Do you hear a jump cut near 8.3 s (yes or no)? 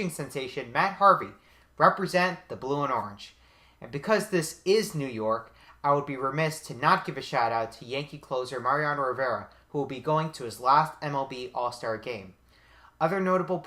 yes